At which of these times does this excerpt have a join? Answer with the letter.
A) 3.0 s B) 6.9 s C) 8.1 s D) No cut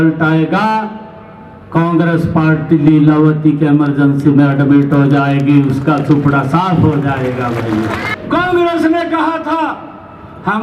C